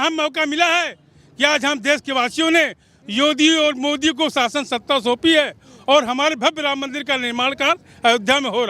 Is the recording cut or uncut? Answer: uncut